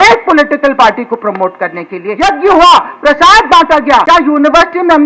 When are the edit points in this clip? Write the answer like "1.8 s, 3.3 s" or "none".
2.0 s, 4.0 s